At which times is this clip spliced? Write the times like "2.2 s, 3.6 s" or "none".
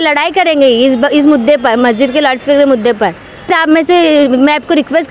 3.5 s